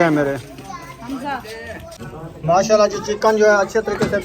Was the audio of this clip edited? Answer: yes; 1 cut; at 2.1 s

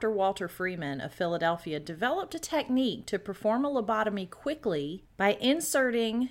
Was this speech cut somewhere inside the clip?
yes; 1 cut; at 5.0 s

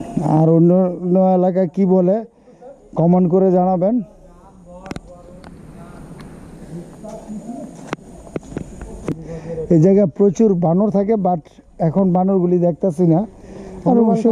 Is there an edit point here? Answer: yes; 1 cut; at 9.1 s

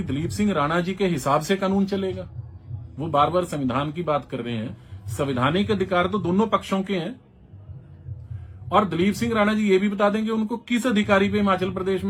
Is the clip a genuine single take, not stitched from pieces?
yes; 0 cuts

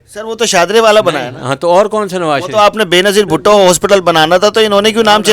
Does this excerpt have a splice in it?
no; 0 cuts

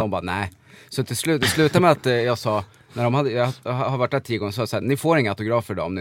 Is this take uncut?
yes; 0 cuts

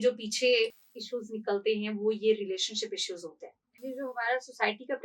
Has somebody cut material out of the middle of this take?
yes; 1 cut; at 3.8 s

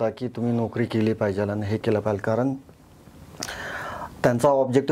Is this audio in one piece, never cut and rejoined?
yes; 0 cuts

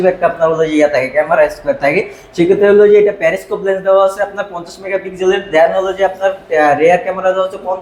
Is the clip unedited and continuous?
yes; 0 cuts

